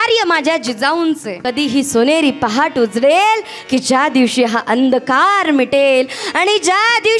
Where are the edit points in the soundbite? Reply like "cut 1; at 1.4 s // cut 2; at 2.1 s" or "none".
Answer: cut 1; at 1.3 s

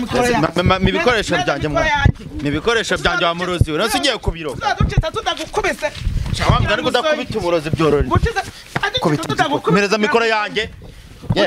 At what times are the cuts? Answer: none

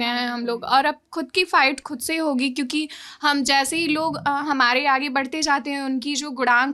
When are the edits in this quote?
none

